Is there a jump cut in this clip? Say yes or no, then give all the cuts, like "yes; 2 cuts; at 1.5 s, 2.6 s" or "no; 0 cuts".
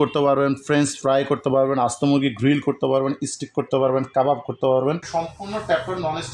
yes; 1 cut; at 5.0 s